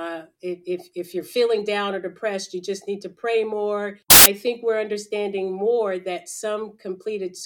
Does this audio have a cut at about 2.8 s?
no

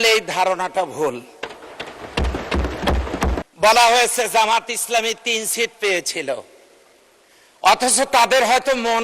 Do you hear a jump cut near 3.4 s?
yes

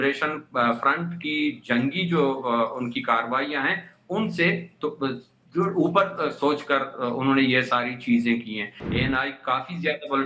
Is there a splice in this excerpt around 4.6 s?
no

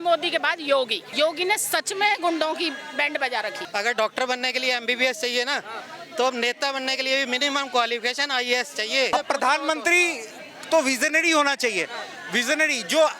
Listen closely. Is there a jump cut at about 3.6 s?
yes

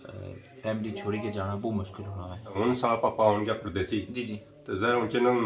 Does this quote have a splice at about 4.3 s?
no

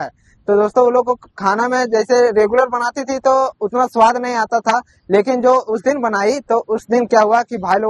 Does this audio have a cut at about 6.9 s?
no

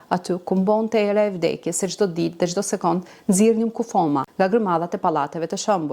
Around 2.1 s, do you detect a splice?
no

